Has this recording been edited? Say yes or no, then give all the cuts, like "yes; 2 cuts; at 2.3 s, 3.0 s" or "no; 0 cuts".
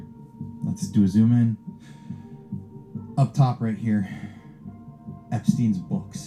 no; 0 cuts